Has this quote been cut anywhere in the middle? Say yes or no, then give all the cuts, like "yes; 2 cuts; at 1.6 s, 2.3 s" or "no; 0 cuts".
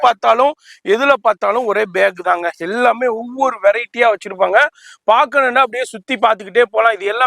no; 0 cuts